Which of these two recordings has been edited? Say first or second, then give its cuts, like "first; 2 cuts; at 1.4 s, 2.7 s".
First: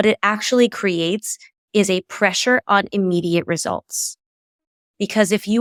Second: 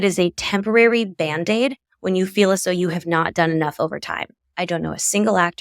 second; 1 cut; at 4.5 s